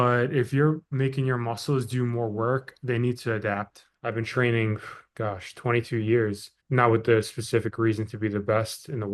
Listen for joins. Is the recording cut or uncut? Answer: cut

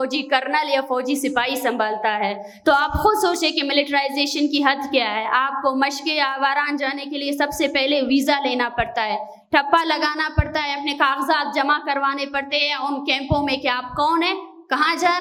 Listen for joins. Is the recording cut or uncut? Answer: uncut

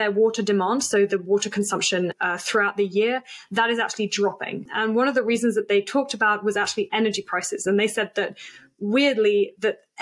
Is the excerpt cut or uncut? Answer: cut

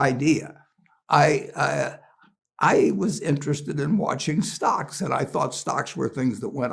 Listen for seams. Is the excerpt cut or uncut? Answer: uncut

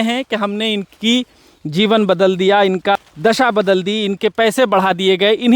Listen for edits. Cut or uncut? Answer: cut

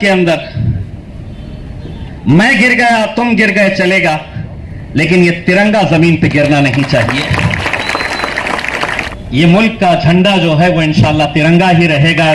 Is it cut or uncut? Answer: cut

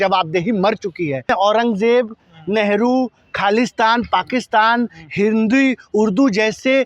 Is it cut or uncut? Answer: cut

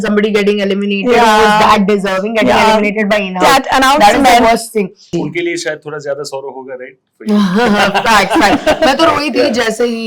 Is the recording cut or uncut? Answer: cut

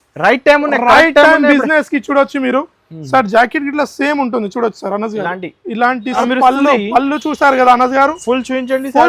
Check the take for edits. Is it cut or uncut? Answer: cut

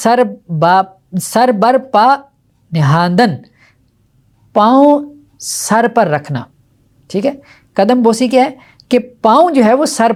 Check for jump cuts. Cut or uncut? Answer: uncut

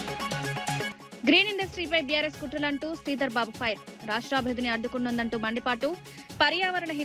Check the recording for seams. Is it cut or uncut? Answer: cut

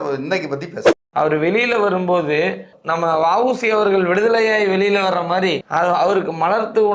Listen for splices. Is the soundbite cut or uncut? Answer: cut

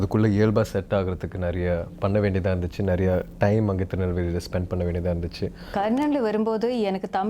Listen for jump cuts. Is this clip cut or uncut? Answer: cut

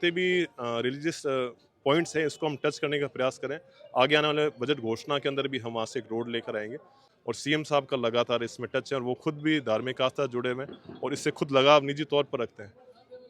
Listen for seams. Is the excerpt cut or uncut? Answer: cut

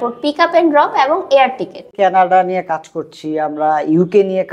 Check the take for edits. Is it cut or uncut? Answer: cut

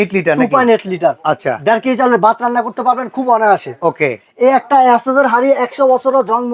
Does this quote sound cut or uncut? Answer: uncut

